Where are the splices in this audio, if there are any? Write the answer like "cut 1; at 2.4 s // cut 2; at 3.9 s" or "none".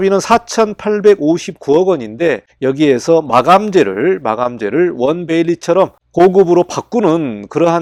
none